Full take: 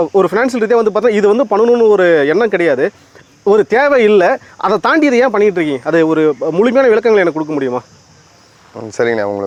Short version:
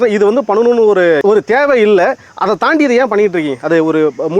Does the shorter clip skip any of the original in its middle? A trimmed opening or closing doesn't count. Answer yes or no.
yes